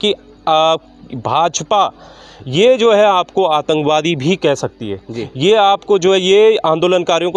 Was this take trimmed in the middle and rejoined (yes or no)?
no